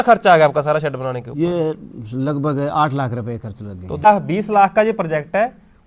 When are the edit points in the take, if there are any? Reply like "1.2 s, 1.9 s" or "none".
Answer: 4.0 s